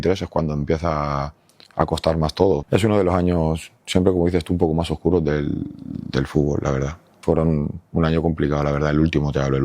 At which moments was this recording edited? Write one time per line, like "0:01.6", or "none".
0:02.6
0:07.1